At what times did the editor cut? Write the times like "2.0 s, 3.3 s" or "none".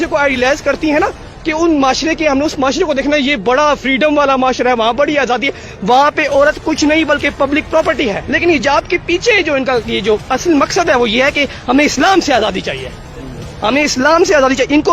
8.4 s